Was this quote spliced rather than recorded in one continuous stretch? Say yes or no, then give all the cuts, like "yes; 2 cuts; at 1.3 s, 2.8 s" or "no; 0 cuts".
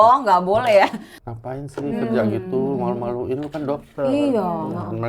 yes; 1 cut; at 1.1 s